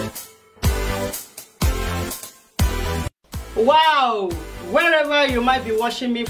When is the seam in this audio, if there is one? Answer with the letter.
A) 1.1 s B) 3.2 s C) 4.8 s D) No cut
A